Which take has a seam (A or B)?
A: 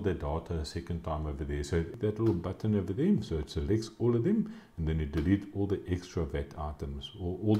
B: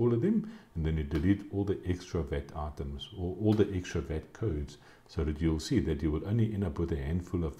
A